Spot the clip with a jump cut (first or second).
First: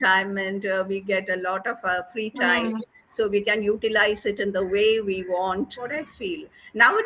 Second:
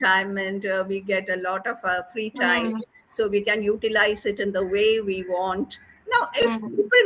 first